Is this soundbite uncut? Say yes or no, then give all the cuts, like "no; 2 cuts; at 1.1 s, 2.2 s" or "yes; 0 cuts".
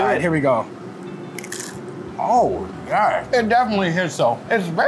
yes; 0 cuts